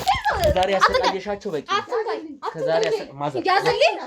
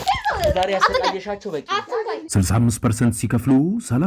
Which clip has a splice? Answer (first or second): second